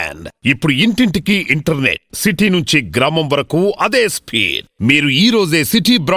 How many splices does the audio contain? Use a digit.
0